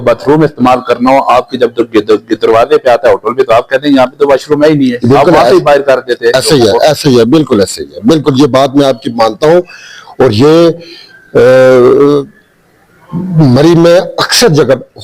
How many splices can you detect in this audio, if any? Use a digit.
0